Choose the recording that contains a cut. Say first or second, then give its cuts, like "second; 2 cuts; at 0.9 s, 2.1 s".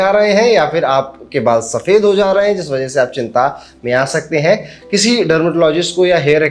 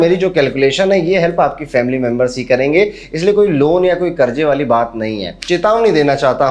second; 1 cut; at 5.4 s